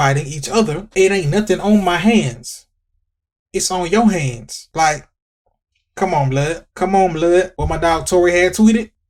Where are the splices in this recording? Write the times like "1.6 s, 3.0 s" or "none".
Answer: none